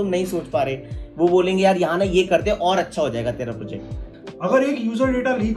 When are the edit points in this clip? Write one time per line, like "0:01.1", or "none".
0:04.0